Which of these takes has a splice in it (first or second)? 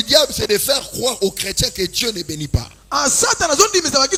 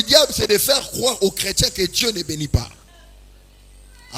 second